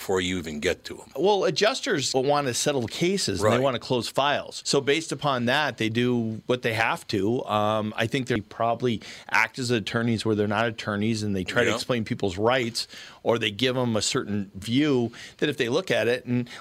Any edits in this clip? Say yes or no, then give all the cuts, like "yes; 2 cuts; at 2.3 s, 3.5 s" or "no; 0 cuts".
yes; 1 cut; at 8.4 s